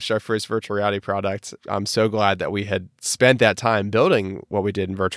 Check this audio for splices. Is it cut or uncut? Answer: cut